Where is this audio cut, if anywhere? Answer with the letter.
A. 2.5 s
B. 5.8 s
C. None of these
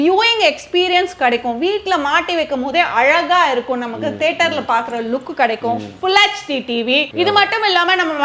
C